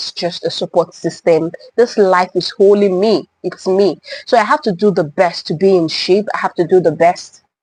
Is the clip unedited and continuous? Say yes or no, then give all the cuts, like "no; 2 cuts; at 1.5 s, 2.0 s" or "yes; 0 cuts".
yes; 0 cuts